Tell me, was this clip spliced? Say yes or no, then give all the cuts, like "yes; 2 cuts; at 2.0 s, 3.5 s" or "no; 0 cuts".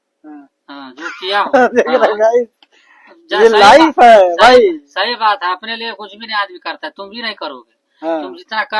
no; 0 cuts